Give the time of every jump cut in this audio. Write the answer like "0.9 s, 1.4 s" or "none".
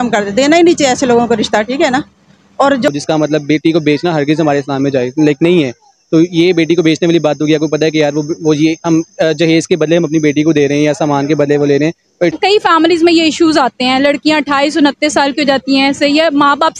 2.9 s, 12.3 s

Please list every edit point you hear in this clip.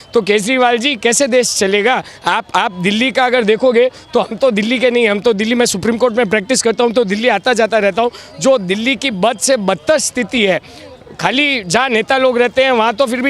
none

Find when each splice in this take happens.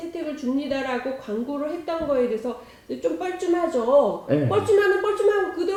none

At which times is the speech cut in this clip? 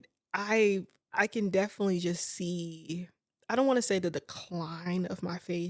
1.0 s

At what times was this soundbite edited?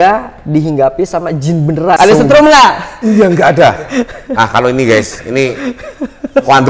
2.0 s

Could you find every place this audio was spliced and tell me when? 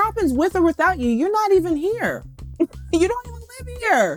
none

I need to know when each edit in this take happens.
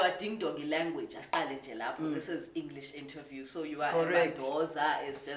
none

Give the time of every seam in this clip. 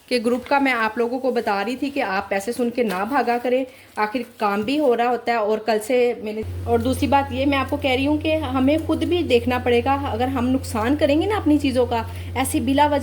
6.4 s

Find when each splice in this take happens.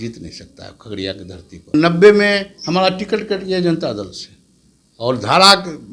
1.7 s

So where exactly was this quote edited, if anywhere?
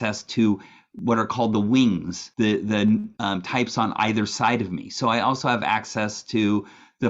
2.2 s, 3.1 s

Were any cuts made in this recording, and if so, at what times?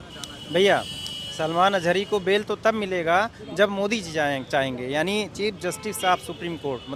none

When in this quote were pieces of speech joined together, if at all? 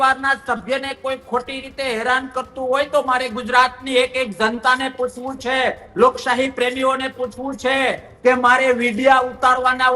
none

